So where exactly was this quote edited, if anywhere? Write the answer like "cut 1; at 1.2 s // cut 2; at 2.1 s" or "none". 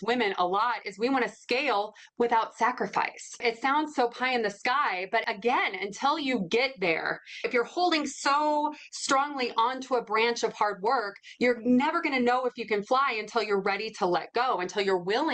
cut 1; at 3.4 s // cut 2; at 5.2 s // cut 3; at 7.5 s